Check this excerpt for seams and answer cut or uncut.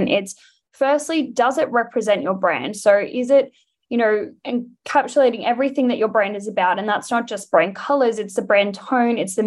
uncut